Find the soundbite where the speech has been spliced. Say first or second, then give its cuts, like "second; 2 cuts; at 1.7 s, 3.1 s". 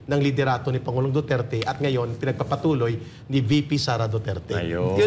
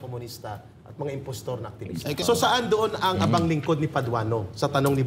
second; 1 cut; at 2.2 s